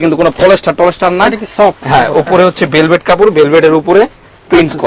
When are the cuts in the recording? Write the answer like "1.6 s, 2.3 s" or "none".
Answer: none